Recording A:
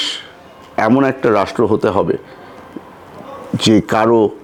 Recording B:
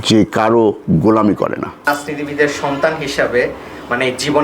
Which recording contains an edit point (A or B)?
B